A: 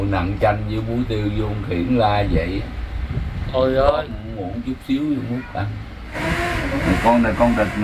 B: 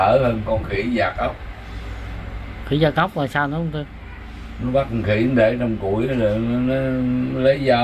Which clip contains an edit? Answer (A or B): A